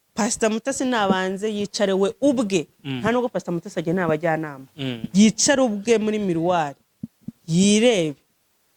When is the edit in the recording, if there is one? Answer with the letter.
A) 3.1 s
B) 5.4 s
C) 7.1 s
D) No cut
D